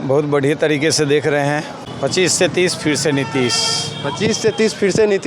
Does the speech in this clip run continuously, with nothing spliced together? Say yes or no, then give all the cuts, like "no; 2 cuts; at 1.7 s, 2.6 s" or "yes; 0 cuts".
no; 1 cut; at 1.9 s